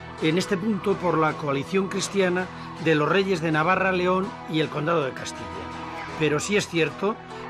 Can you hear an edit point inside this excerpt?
yes; 1 cut; at 1.7 s

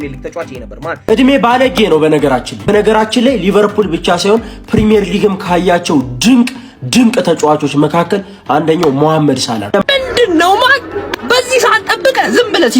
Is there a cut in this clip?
yes; 3 cuts; at 1.1 s, 2.6 s, 9.8 s

